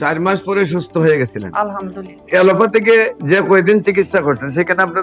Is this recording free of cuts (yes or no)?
no